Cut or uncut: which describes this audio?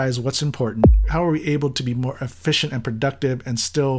cut